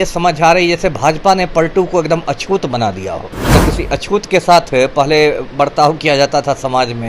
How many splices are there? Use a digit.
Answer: 1